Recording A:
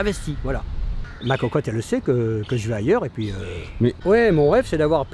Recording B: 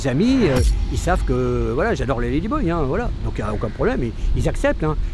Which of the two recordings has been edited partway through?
A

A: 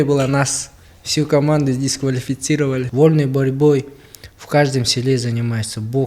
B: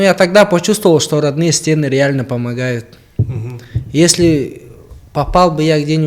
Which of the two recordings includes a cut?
A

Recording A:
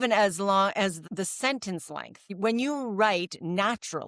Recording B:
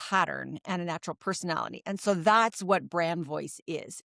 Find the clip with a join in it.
A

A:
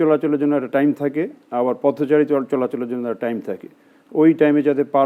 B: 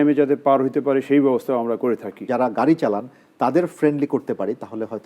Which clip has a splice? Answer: B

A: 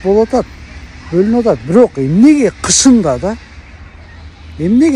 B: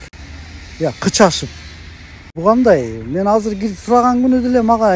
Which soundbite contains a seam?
B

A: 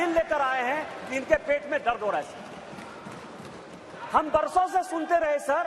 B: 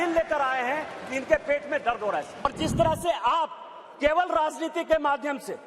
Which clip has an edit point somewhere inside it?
B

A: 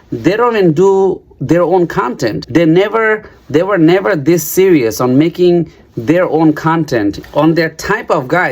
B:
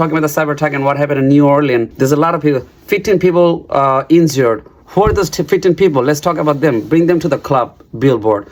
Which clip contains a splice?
A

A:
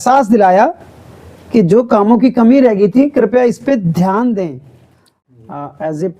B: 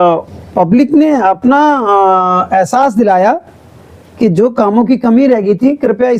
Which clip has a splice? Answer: A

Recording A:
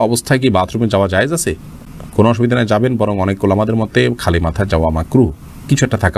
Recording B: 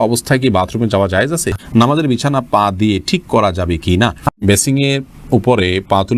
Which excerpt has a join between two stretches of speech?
B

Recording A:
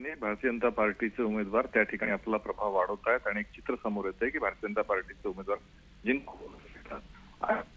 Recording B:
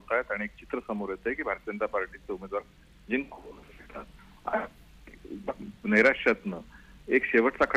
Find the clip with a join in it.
A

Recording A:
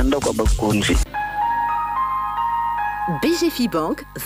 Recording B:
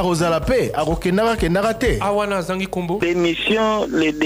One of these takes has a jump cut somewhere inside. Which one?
A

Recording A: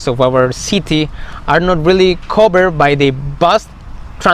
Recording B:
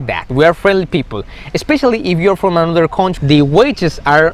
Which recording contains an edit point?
B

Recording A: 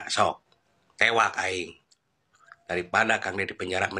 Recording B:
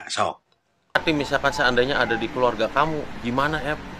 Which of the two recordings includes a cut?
B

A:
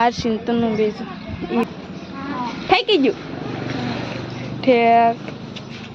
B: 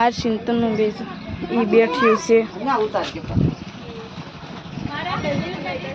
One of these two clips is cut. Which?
A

